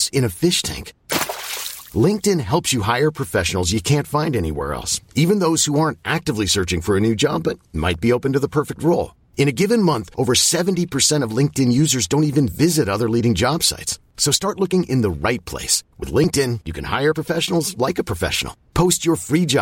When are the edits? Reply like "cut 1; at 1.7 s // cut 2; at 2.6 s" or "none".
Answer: none